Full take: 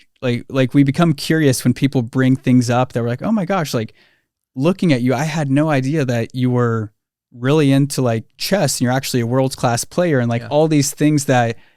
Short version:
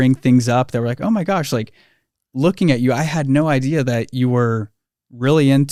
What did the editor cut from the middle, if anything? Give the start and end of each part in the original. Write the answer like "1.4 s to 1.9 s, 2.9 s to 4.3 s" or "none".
none